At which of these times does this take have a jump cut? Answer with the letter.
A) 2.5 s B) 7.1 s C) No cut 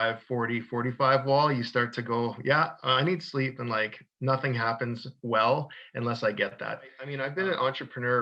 B